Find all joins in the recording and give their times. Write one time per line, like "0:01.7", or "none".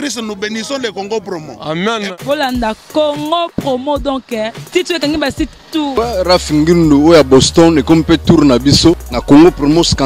0:05.9
0:09.1

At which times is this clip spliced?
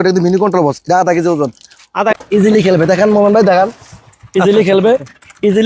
0:02.1

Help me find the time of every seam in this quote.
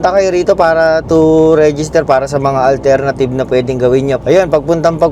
0:04.2

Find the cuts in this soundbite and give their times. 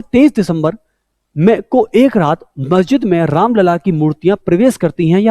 none

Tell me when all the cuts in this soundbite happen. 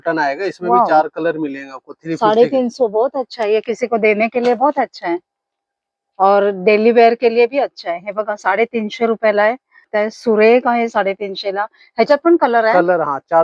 none

